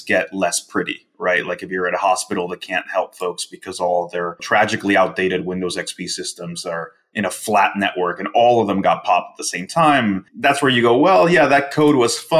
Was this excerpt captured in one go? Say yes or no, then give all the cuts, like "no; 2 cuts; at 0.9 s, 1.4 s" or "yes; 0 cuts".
no; 2 cuts; at 4.4 s, 10.3 s